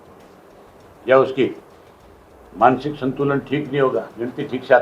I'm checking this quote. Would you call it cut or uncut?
uncut